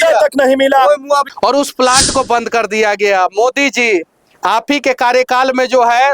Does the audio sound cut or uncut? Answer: cut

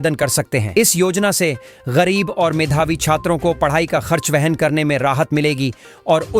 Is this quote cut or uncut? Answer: uncut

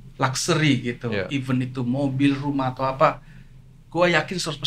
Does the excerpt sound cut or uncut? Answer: uncut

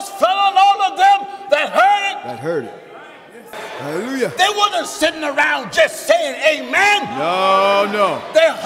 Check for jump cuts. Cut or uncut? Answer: cut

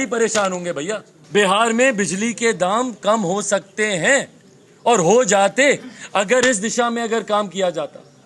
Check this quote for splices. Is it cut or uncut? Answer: cut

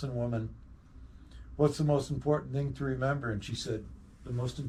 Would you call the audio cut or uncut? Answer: uncut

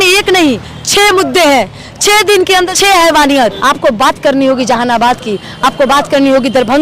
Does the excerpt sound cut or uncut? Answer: cut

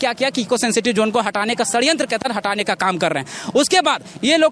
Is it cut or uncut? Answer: uncut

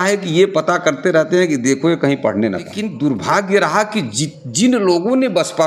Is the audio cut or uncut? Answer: cut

